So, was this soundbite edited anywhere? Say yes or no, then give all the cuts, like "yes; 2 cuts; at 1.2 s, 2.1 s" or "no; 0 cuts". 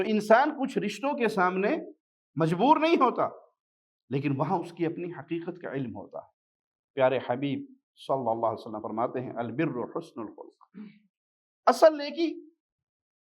no; 0 cuts